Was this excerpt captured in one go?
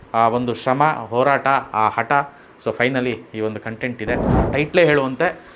no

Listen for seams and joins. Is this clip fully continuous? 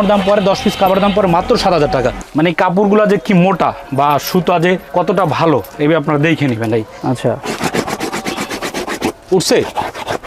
no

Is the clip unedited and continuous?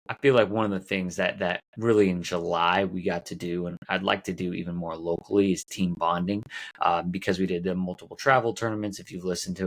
yes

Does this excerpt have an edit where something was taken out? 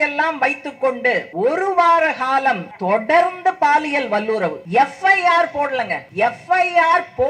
yes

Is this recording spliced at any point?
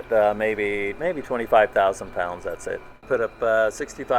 yes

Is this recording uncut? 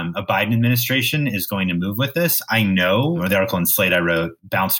no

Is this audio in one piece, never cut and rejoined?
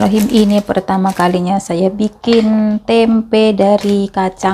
yes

